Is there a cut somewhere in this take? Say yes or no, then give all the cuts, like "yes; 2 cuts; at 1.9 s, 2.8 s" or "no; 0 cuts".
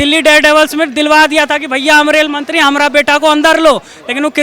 no; 0 cuts